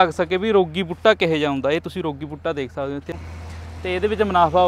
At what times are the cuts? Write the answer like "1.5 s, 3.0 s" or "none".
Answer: 3.1 s